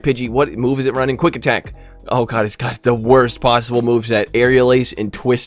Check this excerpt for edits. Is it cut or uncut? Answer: uncut